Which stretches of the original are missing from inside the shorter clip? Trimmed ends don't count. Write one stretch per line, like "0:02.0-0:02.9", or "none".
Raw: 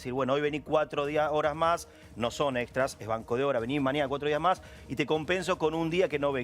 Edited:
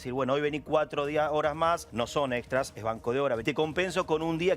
0:01.9-0:02.1
0:03.7-0:04.9